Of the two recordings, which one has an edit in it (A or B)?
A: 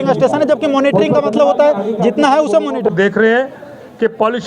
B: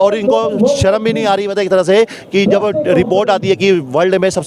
A